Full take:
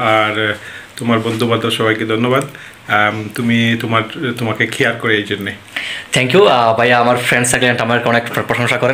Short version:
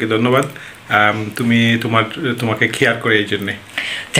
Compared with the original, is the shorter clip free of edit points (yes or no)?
yes